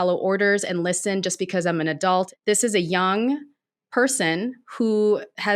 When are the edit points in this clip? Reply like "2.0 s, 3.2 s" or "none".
2.3 s